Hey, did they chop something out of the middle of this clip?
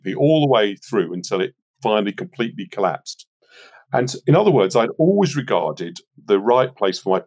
no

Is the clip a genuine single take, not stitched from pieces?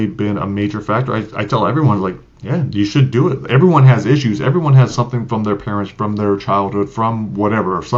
yes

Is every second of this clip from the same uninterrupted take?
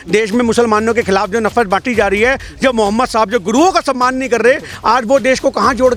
yes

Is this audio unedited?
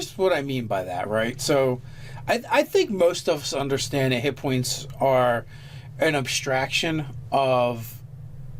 yes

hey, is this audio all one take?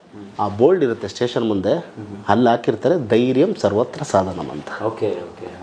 yes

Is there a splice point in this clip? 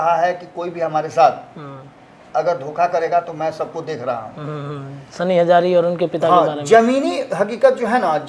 no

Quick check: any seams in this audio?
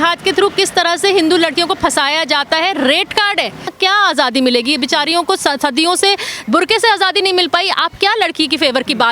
yes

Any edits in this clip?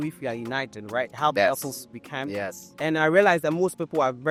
no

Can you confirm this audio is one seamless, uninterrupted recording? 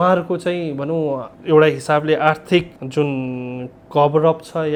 yes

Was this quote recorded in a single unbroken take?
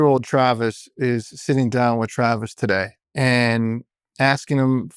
no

